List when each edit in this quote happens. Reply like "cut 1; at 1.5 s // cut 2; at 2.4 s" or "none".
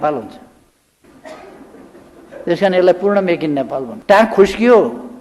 cut 1; at 3.9 s